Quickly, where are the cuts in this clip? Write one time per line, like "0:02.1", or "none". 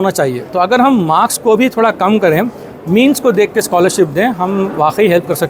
none